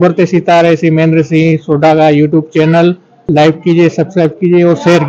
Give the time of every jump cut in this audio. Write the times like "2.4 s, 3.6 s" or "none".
2.0 s, 3.2 s